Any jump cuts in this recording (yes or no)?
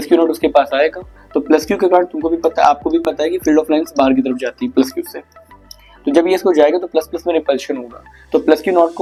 no